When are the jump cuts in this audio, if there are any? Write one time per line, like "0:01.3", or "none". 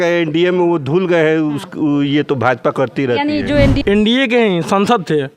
0:03.8